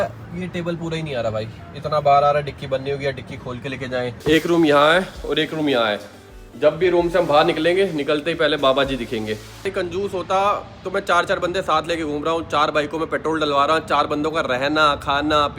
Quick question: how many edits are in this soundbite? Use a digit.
2